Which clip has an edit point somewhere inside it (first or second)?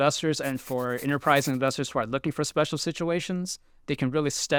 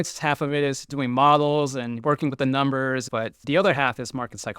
second